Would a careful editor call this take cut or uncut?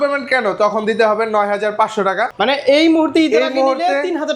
cut